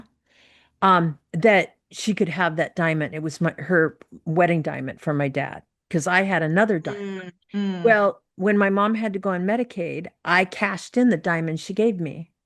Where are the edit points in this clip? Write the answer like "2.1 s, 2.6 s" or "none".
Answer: none

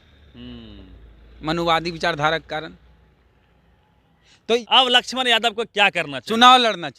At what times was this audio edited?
4.6 s

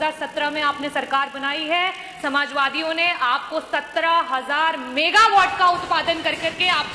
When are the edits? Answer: none

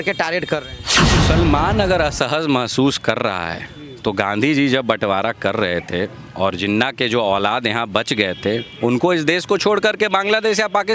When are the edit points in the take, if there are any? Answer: 1.2 s

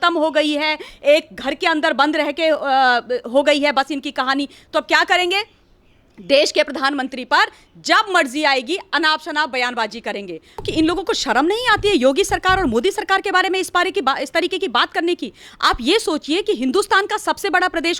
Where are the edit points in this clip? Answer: 10.7 s

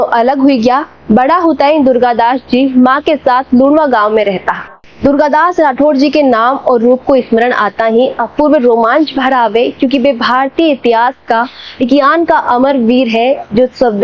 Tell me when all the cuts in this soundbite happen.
none

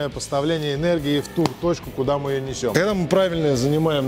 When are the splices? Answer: 2.7 s

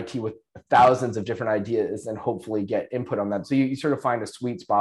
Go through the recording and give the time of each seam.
3.4 s

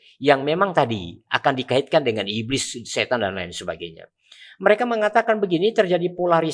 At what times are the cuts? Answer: none

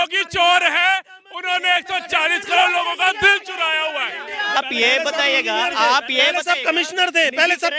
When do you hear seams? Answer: 4.6 s

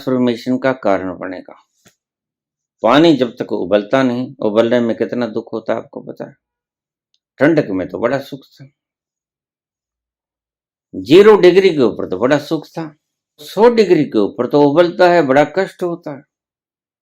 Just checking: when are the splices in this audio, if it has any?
13.5 s

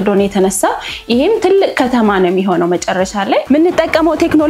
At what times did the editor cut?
3.4 s

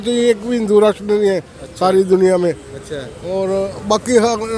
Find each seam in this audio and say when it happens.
none

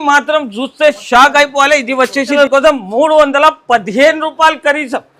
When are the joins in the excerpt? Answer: 2.4 s

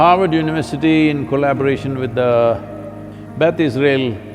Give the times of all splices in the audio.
none

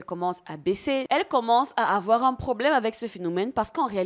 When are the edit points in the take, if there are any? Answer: 1.1 s

